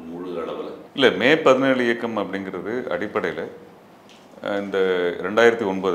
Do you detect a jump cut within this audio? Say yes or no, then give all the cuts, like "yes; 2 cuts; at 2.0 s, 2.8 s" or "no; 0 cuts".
no; 0 cuts